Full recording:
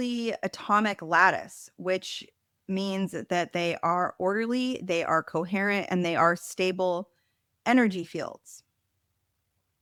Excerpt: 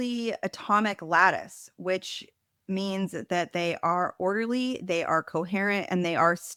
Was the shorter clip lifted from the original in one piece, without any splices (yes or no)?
yes